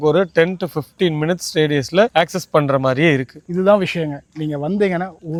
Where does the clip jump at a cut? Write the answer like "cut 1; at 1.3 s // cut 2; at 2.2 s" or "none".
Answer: none